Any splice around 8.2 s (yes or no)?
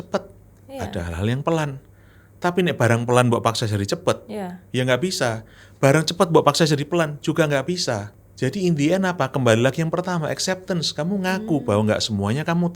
yes